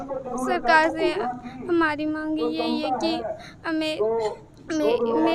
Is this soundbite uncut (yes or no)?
yes